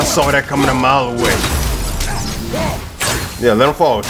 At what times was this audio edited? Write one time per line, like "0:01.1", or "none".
0:01.4